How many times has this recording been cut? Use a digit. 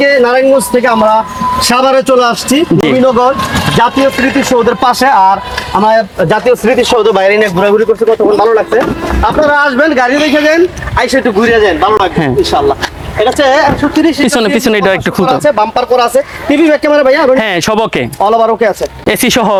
0